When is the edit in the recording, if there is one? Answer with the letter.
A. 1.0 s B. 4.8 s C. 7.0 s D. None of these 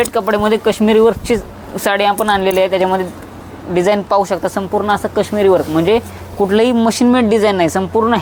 D